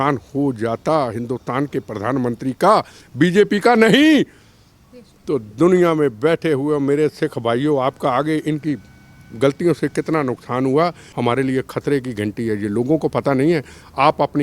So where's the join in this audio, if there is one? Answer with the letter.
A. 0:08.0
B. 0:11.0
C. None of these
B